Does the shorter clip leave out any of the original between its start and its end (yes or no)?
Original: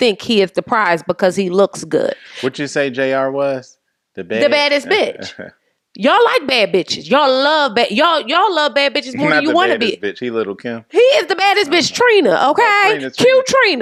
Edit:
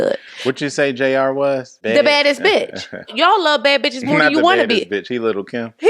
yes